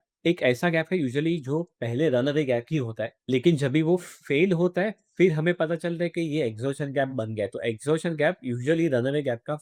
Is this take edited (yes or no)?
no